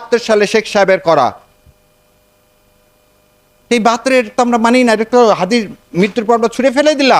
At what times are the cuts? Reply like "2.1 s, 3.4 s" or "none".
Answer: none

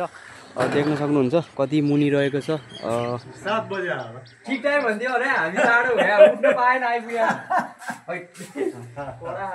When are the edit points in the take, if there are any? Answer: 3.3 s

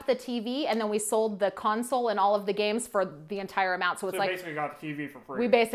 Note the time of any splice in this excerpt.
none

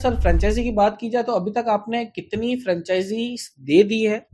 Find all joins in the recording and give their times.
none

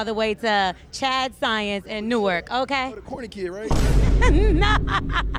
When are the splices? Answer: none

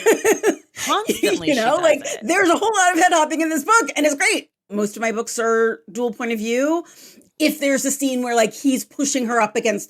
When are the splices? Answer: 4.7 s

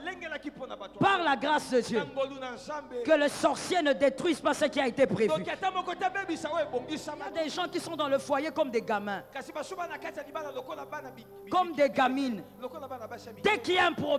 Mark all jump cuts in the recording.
7.3 s

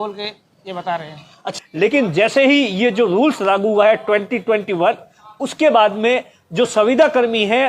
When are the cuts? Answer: 1.4 s

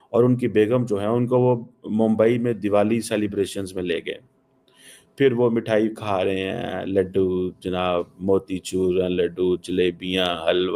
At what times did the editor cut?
none

